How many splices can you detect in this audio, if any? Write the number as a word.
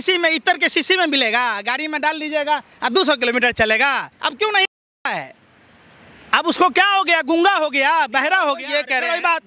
zero